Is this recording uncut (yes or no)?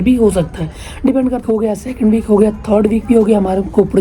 no